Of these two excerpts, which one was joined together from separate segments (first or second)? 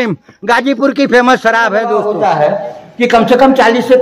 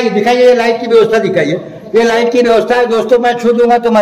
first